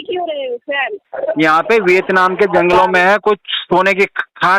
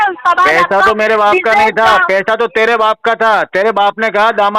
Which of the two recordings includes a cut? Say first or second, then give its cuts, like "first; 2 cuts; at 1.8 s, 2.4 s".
first; 1 cut; at 1.1 s